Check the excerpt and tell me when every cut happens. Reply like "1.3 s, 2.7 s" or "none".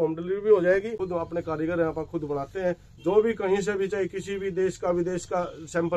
1.0 s